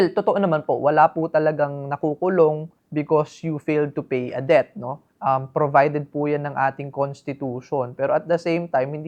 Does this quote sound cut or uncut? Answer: uncut